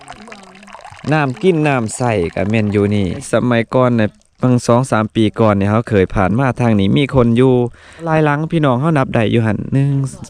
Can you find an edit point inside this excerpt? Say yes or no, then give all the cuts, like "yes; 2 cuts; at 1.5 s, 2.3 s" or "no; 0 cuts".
yes; 2 cuts; at 3.2 s, 8.1 s